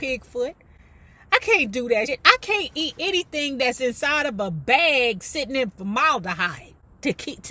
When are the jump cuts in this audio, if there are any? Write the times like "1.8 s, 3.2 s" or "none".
2.1 s